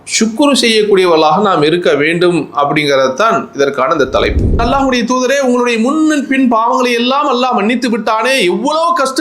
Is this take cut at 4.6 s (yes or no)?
yes